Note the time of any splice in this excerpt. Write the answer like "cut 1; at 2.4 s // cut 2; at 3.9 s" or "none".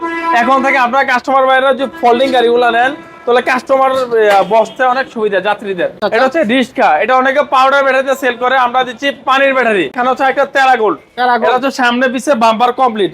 cut 1; at 6.0 s // cut 2; at 9.9 s